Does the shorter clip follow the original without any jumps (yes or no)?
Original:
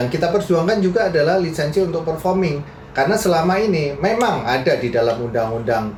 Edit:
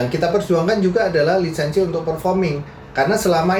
yes